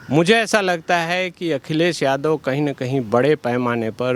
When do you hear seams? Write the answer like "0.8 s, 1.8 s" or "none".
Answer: none

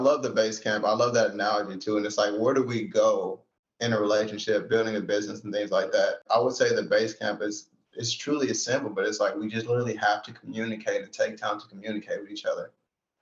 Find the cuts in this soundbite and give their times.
6.2 s

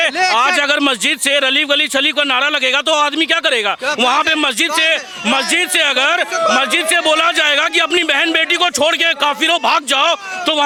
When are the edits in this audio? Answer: none

